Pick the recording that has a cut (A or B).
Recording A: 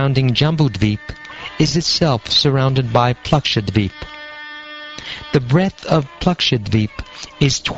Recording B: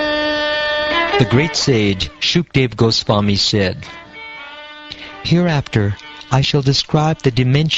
A